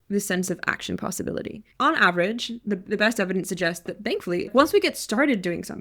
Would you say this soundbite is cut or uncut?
cut